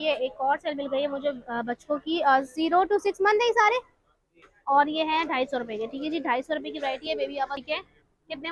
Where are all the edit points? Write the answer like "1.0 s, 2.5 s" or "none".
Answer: 7.6 s